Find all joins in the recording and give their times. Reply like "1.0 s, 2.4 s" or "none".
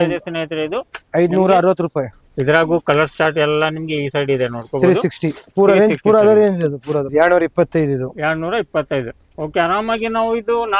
2.2 s, 7.1 s